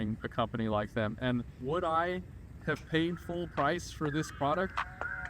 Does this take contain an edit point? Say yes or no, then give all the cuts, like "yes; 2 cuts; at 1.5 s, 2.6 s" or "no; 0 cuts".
yes; 1 cut; at 1.6 s